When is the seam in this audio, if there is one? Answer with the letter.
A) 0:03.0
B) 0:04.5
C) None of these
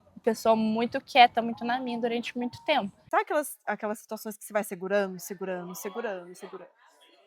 A